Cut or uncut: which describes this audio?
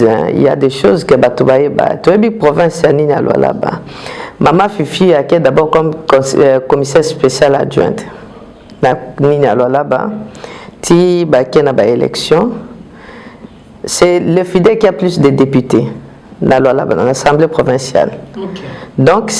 uncut